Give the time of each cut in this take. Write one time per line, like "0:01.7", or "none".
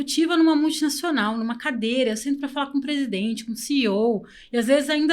none